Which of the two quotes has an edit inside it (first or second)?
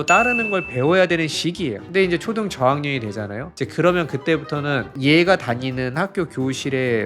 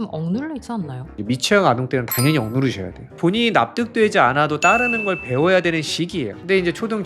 second